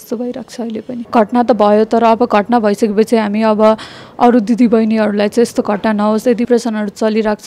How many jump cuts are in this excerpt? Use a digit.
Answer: 2